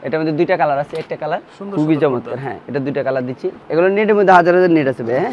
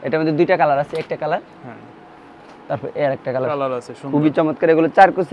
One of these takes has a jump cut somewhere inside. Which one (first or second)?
first